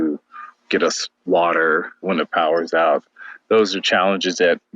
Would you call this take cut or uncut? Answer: cut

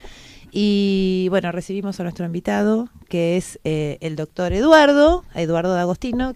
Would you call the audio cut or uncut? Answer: uncut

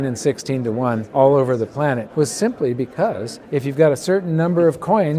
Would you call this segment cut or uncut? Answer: cut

